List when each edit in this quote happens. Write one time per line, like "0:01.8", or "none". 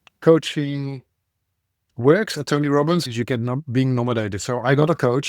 0:03.1